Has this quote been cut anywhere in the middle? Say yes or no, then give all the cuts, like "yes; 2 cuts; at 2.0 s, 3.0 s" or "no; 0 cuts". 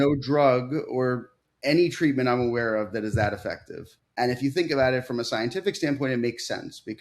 yes; 1 cut; at 4.0 s